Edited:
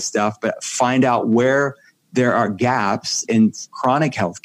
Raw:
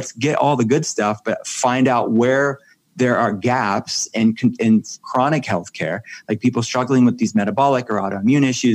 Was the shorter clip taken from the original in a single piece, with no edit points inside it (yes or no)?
no